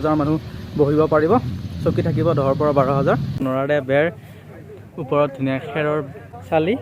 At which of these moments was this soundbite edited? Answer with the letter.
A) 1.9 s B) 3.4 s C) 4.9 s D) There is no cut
B